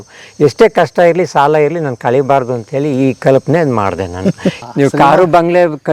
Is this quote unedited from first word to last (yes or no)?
no